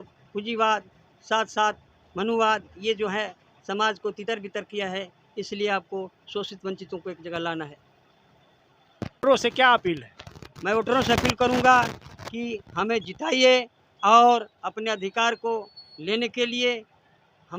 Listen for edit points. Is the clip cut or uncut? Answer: cut